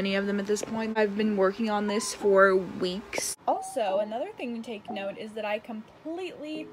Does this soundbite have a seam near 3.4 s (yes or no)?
yes